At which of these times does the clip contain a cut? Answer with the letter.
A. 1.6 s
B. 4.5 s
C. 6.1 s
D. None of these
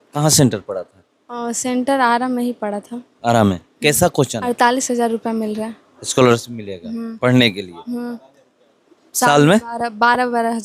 B